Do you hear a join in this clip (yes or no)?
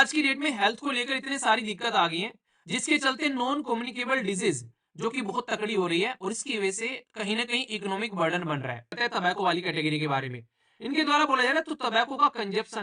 yes